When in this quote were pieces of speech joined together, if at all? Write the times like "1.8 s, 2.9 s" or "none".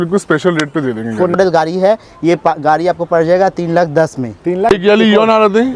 1.4 s, 4.7 s